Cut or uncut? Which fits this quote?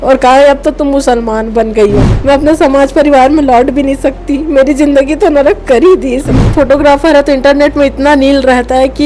cut